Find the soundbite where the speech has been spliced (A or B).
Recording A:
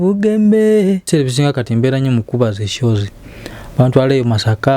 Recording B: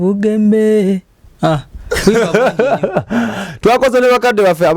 A